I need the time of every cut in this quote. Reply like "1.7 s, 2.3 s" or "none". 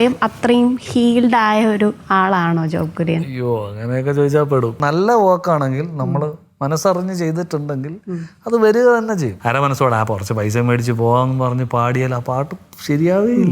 2.0 s, 4.8 s, 9.3 s